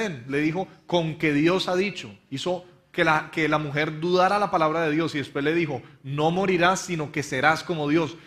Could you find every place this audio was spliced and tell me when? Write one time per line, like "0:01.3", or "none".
0:07.0